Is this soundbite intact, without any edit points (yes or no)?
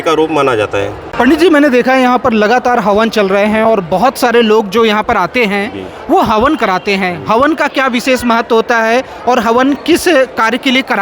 no